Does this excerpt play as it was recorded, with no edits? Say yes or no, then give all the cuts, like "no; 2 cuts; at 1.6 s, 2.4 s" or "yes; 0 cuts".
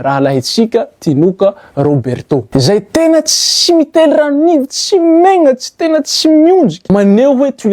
no; 2 cuts; at 2.5 s, 6.8 s